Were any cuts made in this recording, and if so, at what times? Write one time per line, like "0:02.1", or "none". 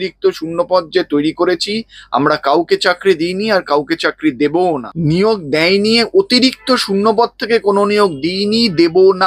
0:04.9